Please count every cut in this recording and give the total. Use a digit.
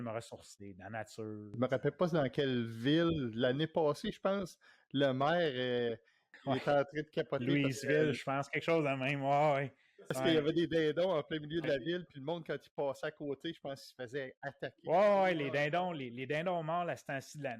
1